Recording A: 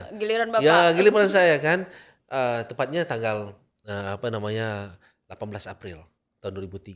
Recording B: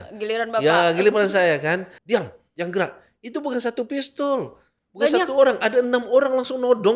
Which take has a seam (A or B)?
B